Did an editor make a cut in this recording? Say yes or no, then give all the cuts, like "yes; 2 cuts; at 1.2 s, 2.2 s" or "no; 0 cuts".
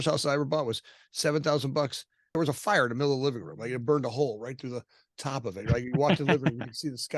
yes; 1 cut; at 2.4 s